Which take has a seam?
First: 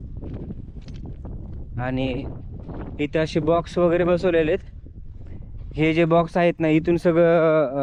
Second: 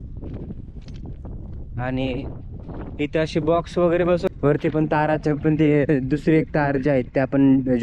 second; 1 cut; at 4.3 s

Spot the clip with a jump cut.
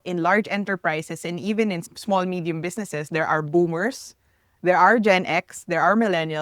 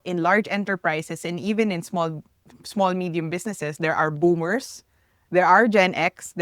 first; 1 cut; at 1.8 s

